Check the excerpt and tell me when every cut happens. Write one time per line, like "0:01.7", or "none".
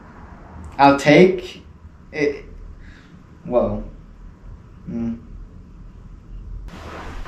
none

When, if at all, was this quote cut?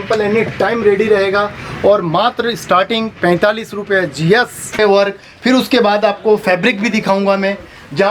0:04.7

